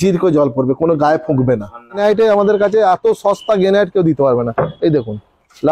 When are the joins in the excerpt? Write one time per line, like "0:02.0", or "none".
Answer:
0:02.0